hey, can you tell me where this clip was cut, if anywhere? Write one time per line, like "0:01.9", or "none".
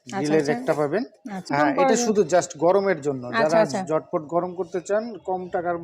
0:01.5

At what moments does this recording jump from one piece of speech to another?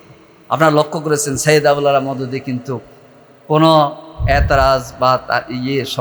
none

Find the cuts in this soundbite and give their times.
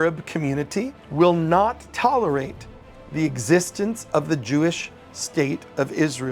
0:01.0

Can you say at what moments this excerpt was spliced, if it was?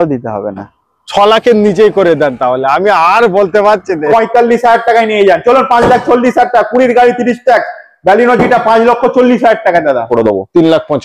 0:04.1
0:10.0

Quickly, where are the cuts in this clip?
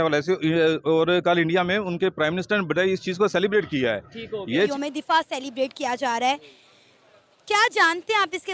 0:04.7

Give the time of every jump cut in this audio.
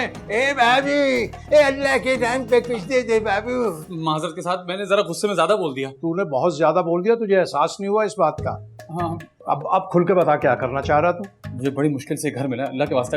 none

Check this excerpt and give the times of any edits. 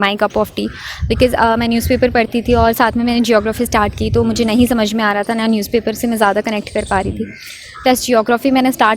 none

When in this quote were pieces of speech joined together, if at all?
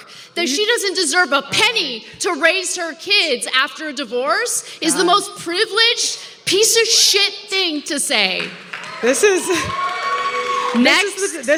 none

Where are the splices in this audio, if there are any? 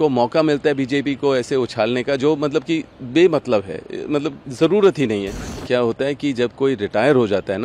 0:05.5

